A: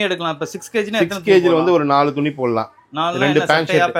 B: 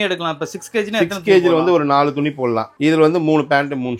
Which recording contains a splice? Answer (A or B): B